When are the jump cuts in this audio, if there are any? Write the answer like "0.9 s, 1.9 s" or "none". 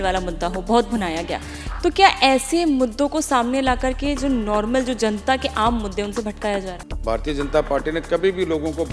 7.1 s